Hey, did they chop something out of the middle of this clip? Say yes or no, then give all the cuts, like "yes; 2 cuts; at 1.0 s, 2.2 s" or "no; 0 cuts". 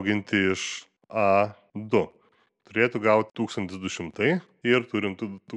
yes; 2 cuts; at 1.7 s, 4.5 s